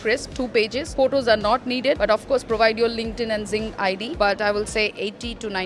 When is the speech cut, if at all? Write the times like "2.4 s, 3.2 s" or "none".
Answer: 2.0 s, 4.1 s